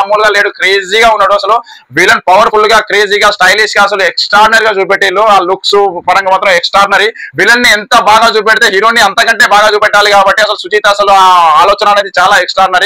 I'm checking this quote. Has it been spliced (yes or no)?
no